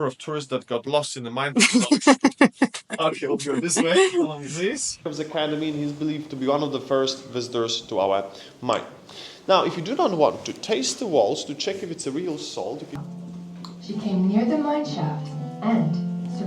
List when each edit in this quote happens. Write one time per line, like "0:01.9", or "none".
0:05.0
0:13.0